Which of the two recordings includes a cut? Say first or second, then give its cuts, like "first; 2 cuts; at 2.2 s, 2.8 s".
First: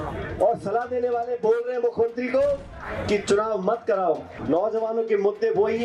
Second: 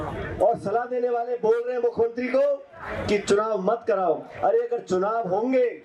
first; 1 cut; at 4.3 s